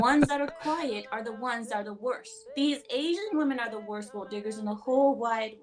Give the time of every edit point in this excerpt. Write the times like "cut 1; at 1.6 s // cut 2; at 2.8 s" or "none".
cut 1; at 2.4 s